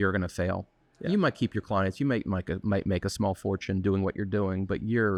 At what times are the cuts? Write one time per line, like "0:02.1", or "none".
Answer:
none